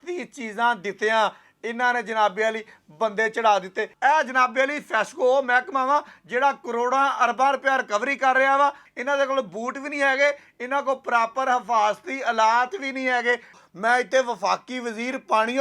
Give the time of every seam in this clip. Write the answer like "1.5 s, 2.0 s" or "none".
3.9 s, 8.9 s, 13.6 s

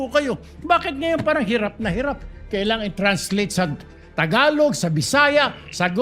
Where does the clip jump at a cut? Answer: none

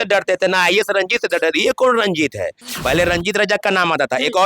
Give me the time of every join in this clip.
2.6 s

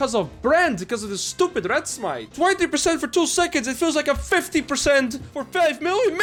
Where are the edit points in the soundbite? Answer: none

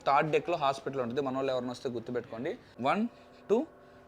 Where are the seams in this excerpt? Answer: 2.7 s

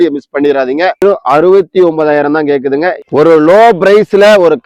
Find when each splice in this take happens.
1.0 s, 3.0 s

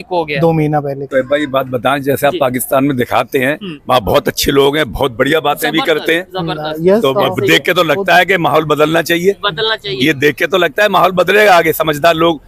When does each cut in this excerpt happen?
1.1 s

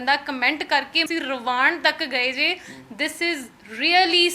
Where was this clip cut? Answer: 1.0 s

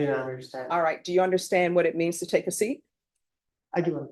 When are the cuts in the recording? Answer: none

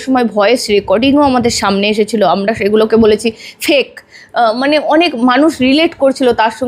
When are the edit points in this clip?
none

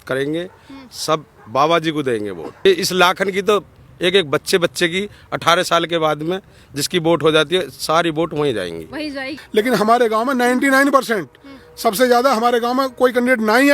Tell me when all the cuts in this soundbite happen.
2.7 s, 9.4 s

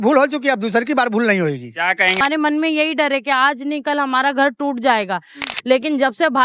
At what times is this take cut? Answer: 2.2 s, 5.4 s

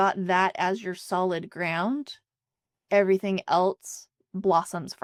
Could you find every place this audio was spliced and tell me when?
none

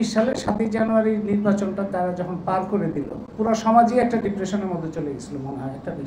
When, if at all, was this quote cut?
3.2 s

